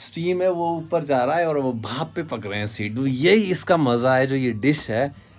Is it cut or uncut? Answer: uncut